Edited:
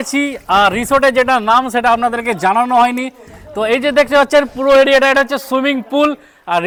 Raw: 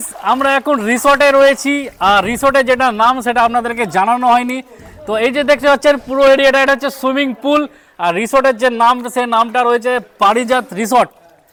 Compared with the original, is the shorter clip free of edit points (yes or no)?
yes